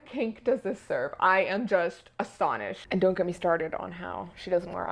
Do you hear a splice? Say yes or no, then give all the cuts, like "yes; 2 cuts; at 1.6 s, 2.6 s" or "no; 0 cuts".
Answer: yes; 1 cut; at 2.8 s